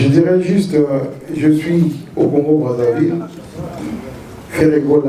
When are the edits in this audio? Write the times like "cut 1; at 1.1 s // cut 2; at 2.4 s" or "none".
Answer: none